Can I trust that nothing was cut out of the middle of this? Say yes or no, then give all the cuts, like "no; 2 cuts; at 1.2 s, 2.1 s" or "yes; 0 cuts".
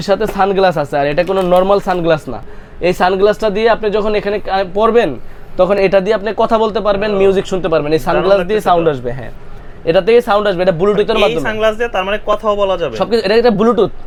yes; 0 cuts